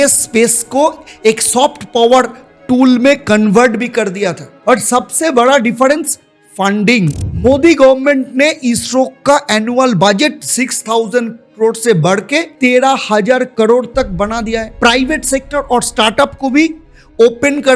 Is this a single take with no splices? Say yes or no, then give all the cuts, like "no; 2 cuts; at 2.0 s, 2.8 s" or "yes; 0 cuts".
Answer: yes; 0 cuts